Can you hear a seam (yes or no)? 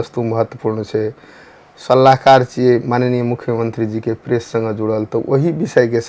no